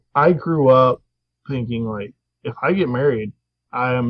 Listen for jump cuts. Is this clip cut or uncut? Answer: uncut